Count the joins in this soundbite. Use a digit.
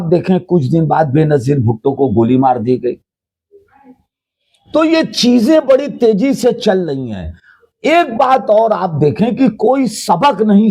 0